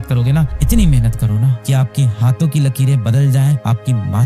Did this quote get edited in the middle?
no; 0 cuts

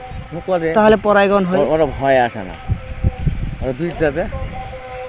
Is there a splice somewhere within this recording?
no; 0 cuts

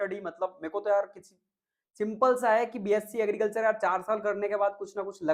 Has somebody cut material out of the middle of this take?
no; 0 cuts

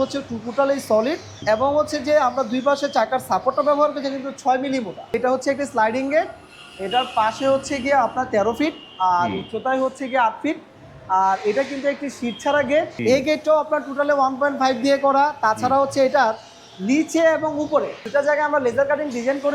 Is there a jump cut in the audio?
yes; 4 cuts; at 1.3 s, 5.1 s, 12.9 s, 18.0 s

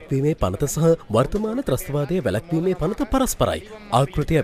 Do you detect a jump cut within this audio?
no; 0 cuts

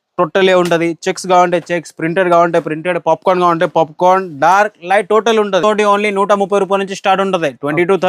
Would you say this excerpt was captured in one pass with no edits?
no; 1 cut; at 5.6 s

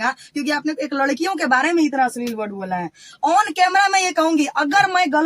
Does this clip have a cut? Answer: no; 0 cuts

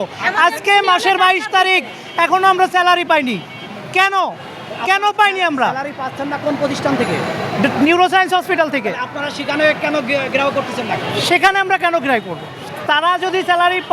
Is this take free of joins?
yes; 0 cuts

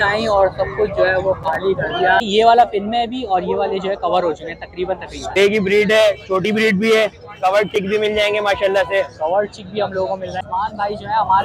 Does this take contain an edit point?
yes; 3 cuts; at 2.2 s, 5.4 s, 10.4 s

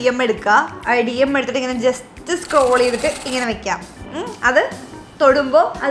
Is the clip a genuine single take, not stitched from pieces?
yes; 0 cuts

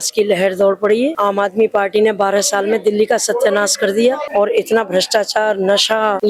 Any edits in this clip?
no; 0 cuts

